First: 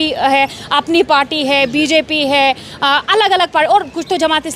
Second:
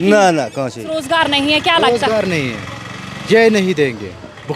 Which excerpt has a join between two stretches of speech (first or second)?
second